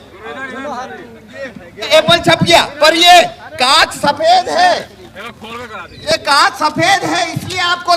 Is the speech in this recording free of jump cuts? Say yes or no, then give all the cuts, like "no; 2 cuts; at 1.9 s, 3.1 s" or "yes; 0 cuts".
no; 1 cut; at 1.9 s